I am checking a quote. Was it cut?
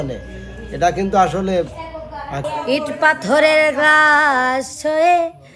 yes; 1 cut; at 2.5 s

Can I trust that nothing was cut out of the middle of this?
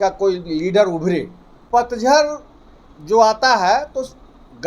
no; 1 cut; at 1.6 s

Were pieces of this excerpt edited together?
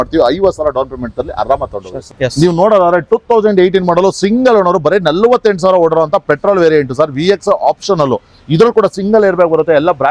no; 0 cuts

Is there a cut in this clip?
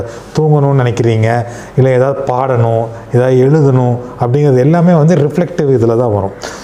no; 0 cuts

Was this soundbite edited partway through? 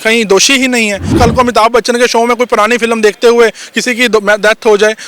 yes; 1 cut; at 1.2 s

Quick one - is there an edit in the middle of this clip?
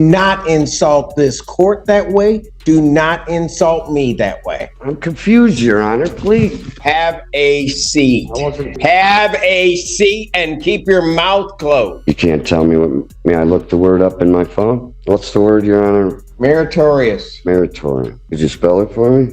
yes; 7 cuts; at 4.7 s, 6.8 s, 8.8 s, 12.0 s, 14.9 s, 16.2 s, 18.2 s

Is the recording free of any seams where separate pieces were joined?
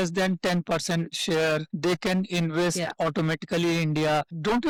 yes; 0 cuts

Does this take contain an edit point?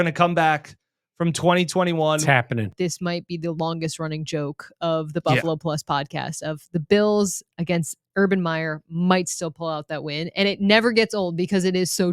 yes; 1 cut; at 2.7 s

